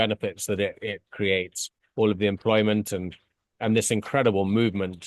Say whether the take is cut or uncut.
uncut